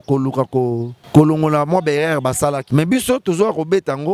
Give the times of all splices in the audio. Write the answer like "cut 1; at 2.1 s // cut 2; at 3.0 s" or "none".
cut 1; at 0.9 s // cut 2; at 2.6 s